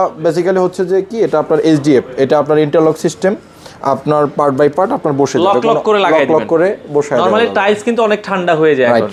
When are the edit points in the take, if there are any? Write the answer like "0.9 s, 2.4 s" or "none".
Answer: none